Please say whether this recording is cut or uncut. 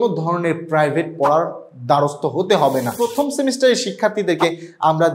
cut